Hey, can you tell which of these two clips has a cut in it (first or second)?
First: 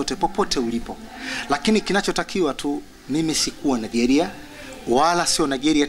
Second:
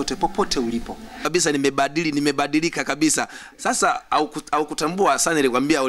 second